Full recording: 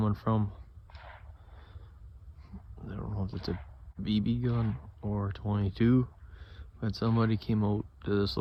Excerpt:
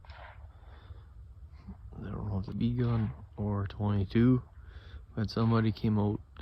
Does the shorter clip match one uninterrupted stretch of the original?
no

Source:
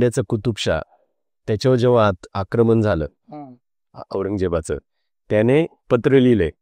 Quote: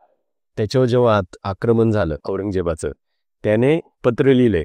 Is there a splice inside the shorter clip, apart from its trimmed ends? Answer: yes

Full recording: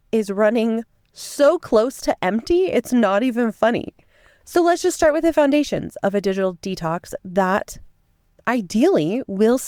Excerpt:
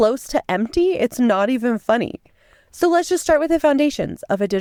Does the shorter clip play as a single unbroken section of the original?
yes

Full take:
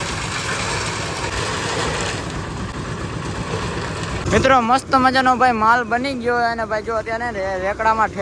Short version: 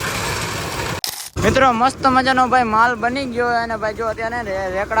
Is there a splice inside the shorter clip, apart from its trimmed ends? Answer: yes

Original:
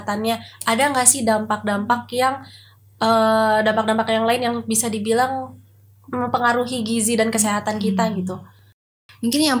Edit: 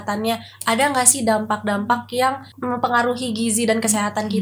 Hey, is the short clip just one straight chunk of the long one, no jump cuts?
no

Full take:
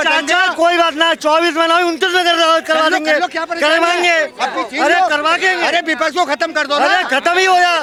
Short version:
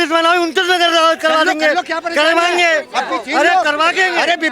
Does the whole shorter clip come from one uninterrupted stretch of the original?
yes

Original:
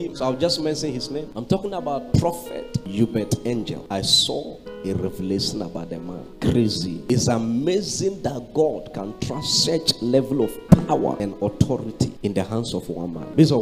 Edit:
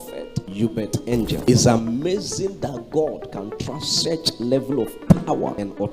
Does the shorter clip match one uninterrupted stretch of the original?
no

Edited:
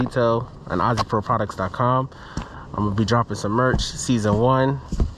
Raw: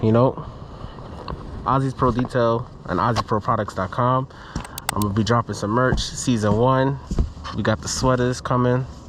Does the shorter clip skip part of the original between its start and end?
no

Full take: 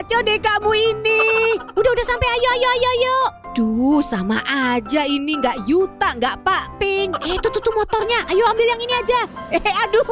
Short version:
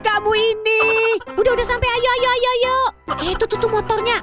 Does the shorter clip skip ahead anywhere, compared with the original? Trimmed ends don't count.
yes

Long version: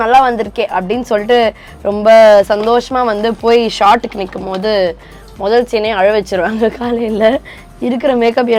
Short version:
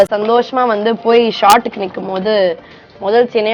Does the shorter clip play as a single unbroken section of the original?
yes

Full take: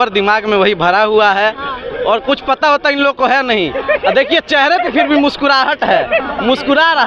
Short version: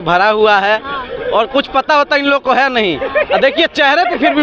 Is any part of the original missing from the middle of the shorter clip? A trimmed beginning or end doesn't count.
no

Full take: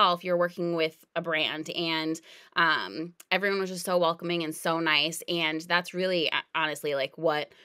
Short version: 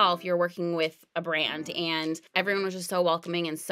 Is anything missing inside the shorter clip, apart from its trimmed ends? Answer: yes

